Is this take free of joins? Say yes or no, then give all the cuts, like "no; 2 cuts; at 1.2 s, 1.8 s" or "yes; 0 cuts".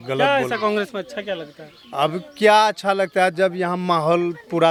yes; 0 cuts